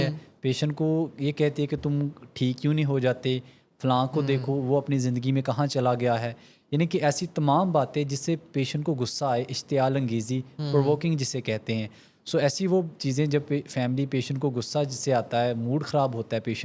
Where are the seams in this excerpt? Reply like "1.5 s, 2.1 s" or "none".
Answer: none